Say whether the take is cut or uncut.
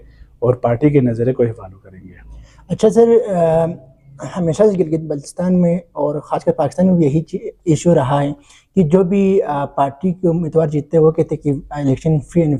uncut